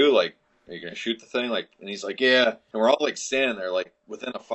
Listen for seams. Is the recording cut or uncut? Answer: cut